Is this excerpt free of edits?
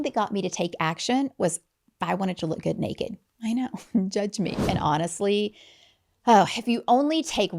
no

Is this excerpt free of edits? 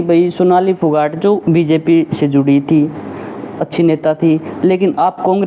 yes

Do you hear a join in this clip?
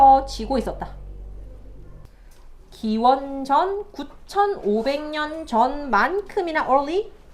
yes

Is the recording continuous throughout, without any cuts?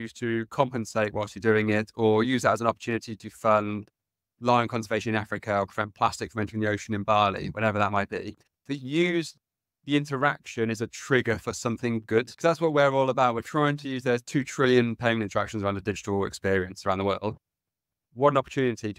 no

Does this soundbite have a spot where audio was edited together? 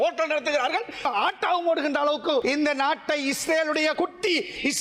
yes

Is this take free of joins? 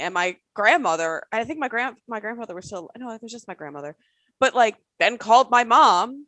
yes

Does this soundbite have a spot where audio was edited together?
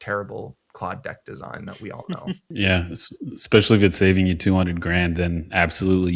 yes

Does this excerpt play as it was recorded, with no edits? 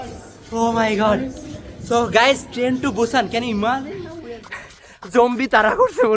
no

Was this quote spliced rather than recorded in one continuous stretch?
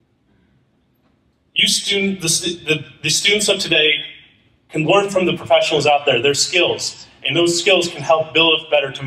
no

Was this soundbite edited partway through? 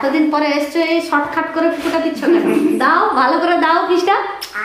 no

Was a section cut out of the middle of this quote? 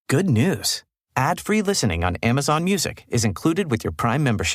no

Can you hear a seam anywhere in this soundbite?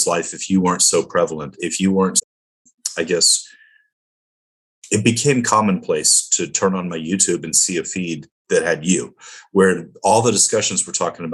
no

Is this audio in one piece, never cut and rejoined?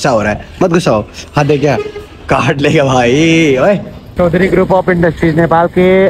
no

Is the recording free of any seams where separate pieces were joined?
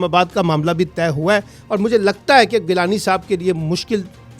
yes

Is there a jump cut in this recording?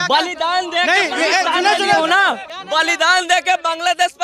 yes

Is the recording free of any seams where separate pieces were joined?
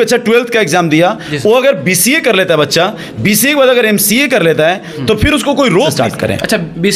no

